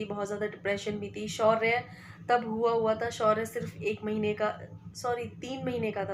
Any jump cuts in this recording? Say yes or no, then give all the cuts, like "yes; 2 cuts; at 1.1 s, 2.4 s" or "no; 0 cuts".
no; 0 cuts